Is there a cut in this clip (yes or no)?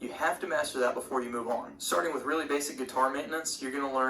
yes